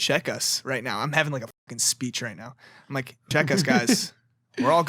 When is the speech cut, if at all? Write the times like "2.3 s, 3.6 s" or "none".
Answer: 3.3 s